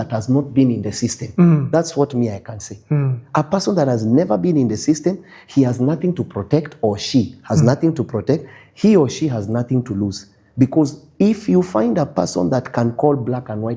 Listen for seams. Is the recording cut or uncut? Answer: uncut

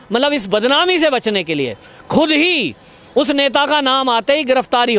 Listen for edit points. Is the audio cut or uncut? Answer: uncut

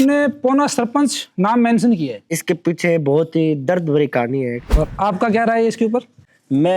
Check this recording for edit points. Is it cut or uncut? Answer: cut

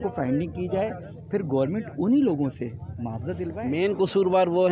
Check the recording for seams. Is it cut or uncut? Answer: cut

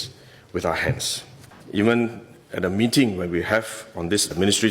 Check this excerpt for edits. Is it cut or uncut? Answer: cut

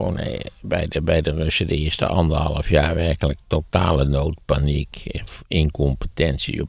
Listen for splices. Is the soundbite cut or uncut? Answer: uncut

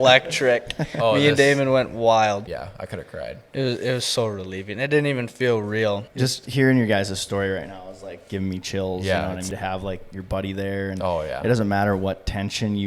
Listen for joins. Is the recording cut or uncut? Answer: cut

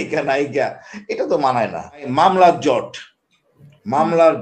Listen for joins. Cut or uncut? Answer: cut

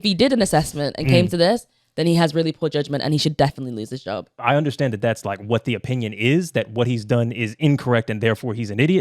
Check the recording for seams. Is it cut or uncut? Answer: cut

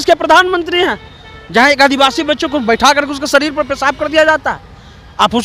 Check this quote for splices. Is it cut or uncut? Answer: uncut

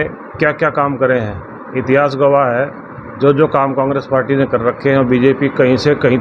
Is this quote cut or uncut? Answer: uncut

